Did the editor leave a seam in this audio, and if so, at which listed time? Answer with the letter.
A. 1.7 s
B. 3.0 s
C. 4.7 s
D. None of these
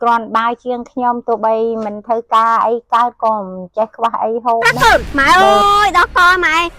C